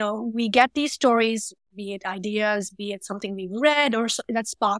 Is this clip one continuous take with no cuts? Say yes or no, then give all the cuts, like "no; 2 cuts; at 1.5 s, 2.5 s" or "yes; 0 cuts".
yes; 0 cuts